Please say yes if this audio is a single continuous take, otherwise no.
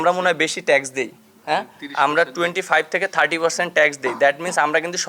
yes